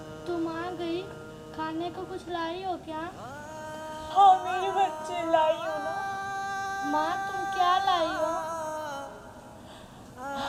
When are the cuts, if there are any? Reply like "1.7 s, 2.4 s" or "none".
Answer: none